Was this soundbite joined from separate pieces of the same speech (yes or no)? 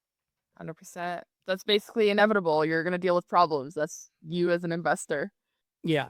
yes